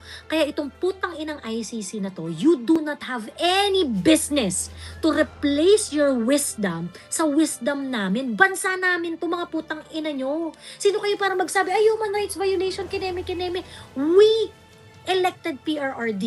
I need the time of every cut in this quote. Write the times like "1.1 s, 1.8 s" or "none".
none